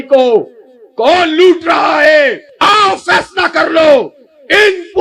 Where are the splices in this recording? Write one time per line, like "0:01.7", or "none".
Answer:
0:02.5